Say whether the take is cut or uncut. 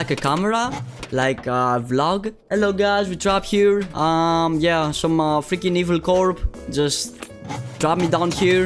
uncut